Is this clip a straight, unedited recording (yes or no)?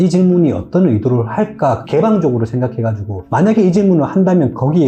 yes